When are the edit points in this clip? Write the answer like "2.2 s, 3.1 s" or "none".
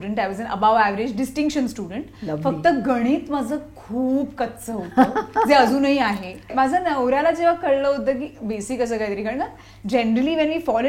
6.5 s